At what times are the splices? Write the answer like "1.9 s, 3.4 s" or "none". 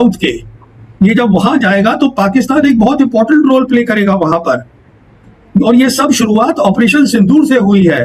none

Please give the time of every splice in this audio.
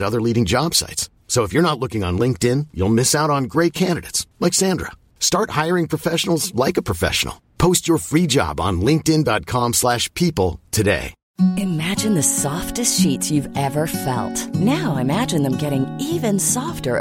11.2 s

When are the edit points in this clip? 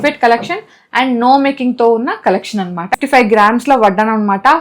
2.9 s

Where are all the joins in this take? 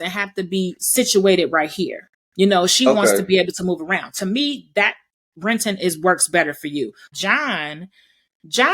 7.1 s

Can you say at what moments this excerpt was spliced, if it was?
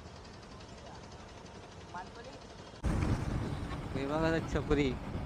2.8 s

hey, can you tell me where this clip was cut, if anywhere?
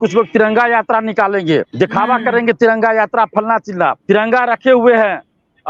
1.7 s, 4.0 s

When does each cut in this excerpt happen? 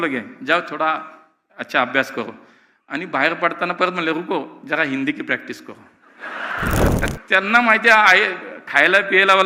6.9 s

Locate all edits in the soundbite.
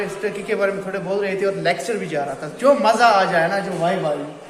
none

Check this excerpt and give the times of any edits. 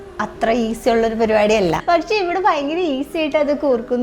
1.8 s

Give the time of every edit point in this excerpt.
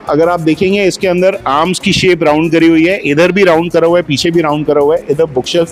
none

